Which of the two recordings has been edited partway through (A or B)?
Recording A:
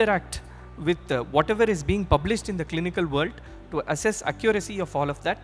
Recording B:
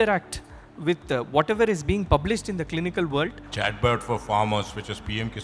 B